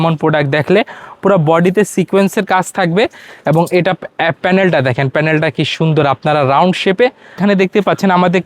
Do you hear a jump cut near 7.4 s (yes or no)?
yes